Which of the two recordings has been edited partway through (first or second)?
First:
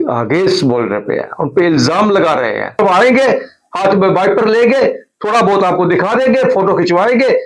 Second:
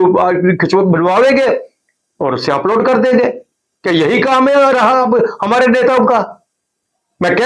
first